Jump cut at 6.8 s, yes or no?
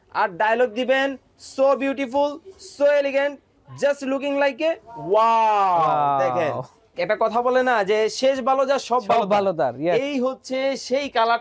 yes